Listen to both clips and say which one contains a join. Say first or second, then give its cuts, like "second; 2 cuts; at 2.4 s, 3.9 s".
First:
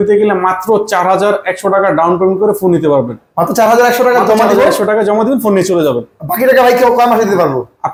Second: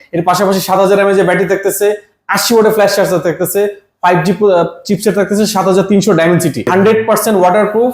second; 1 cut; at 6.7 s